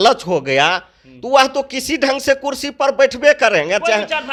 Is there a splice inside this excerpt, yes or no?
no